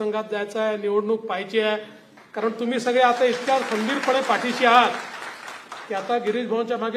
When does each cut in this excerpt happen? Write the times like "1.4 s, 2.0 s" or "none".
none